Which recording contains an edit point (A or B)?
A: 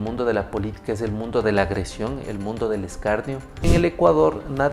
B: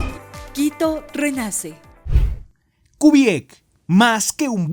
A